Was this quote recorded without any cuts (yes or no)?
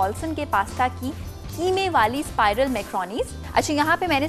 no